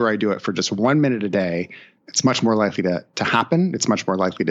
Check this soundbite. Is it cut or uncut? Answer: cut